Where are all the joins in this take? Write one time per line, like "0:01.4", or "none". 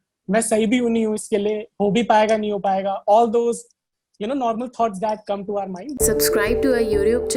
0:05.8